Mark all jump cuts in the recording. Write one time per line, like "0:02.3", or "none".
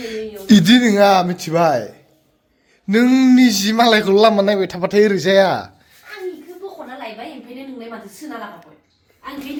none